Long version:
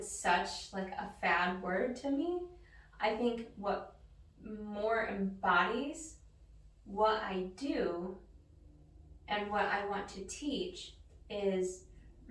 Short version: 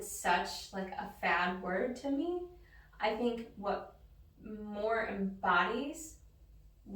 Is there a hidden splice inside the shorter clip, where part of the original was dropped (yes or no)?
no